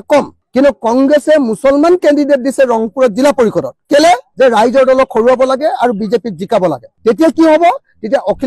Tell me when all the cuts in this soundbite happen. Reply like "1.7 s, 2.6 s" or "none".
none